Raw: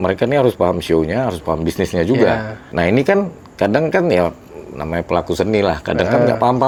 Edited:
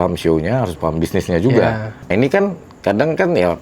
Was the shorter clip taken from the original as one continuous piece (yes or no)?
no